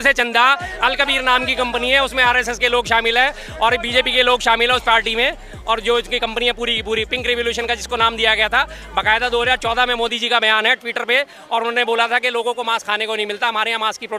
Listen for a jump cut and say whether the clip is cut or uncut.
uncut